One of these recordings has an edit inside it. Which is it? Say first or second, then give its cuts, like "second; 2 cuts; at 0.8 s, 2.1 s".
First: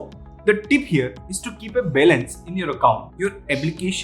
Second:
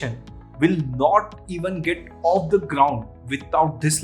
first; 1 cut; at 3.1 s